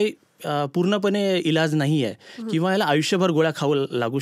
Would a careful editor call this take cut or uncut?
uncut